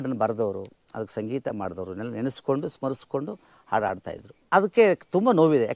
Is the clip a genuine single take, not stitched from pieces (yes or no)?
no